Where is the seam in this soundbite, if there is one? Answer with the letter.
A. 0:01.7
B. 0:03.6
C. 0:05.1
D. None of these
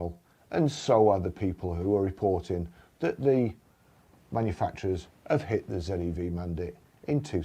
D